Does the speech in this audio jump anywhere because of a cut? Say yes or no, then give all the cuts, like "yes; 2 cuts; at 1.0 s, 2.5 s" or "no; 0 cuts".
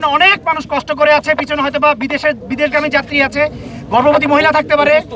no; 0 cuts